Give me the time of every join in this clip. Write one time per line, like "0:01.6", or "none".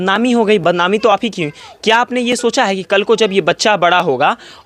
none